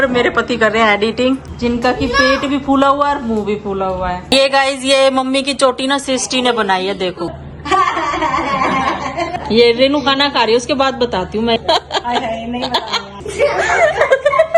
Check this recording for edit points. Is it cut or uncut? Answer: cut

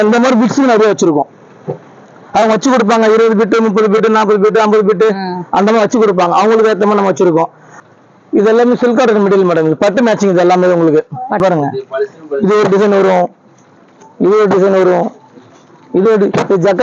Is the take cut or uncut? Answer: cut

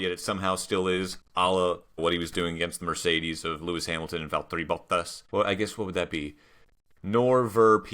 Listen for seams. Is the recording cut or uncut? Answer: cut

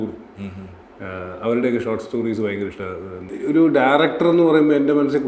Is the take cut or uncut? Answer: cut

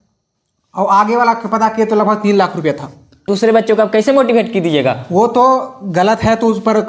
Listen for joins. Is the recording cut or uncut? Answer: cut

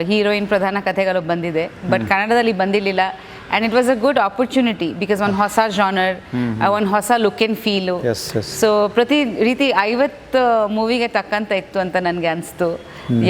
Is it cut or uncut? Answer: uncut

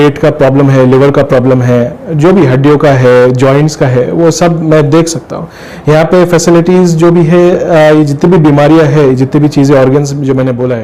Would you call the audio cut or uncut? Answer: uncut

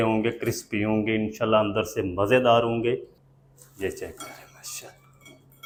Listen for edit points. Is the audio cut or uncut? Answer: uncut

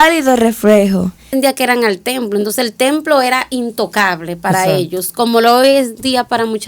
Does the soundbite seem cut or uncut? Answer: cut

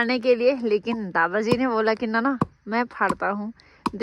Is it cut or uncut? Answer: uncut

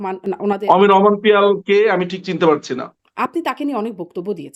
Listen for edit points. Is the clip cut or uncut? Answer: uncut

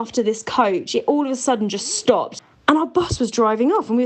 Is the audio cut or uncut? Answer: cut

